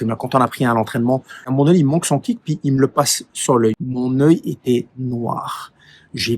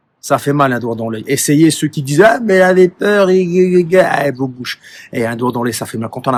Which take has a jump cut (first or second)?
first